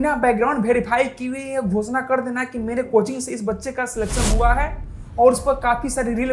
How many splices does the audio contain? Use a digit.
0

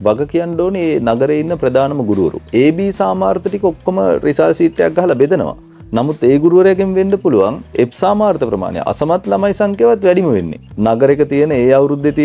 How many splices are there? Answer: 2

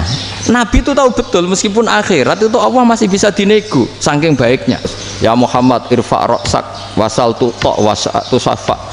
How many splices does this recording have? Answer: 1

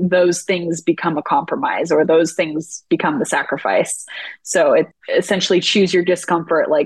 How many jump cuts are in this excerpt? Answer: 1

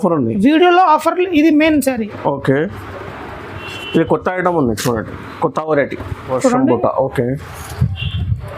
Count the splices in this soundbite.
1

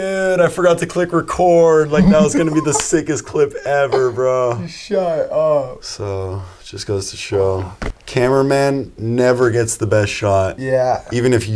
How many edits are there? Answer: 1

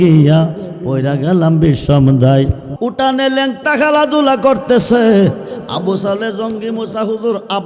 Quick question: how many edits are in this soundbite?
1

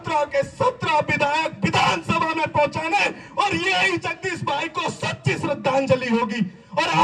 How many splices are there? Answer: 0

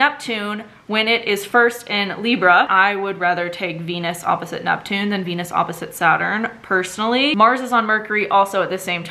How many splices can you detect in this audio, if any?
2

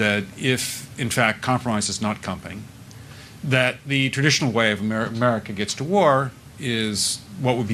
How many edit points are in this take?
0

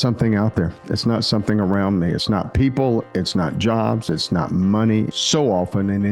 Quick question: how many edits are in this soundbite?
1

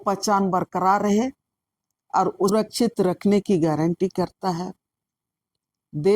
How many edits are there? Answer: 1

